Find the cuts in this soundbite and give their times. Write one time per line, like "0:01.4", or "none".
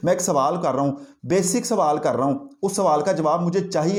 none